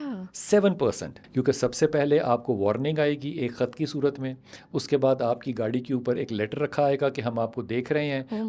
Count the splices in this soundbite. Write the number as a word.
one